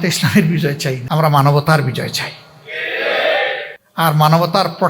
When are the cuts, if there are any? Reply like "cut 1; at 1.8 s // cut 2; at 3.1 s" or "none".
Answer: cut 1; at 1.0 s // cut 2; at 3.8 s

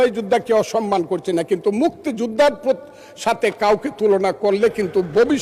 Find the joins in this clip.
none

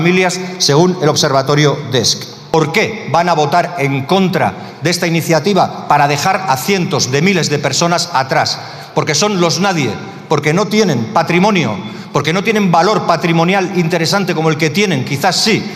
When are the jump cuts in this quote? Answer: cut 1; at 2.5 s

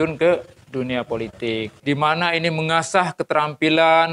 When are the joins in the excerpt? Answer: cut 1; at 1.7 s

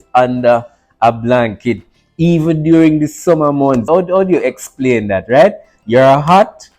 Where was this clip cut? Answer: cut 1; at 3.8 s

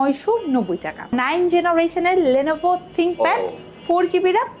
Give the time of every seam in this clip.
cut 1; at 1.1 s

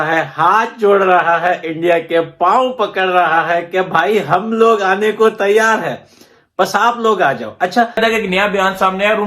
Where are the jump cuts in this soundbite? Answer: cut 1; at 8.0 s

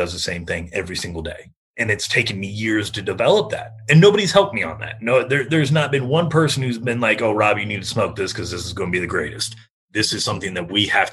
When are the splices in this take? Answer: none

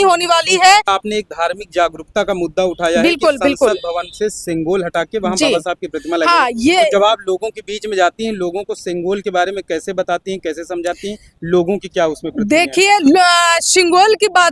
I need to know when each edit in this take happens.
none

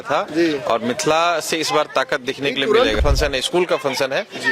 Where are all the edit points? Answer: cut 1; at 3.0 s

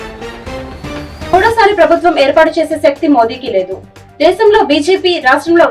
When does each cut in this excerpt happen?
cut 1; at 1.3 s

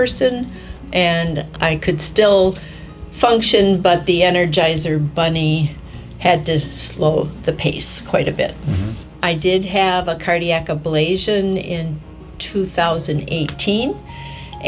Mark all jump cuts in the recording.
cut 1; at 1.5 s // cut 2; at 9.0 s

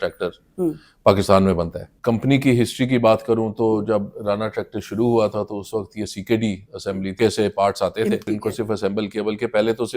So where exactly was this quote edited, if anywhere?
cut 1; at 1.9 s // cut 2; at 7.2 s // cut 3; at 8.3 s

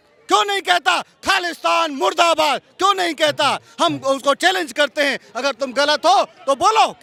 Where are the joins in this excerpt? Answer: none

